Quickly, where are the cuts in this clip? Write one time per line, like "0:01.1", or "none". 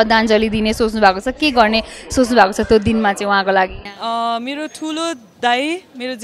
0:03.9